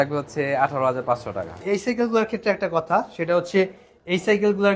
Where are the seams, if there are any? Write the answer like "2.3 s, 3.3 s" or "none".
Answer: 1.6 s